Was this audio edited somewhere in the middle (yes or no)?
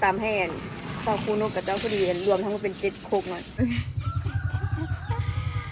yes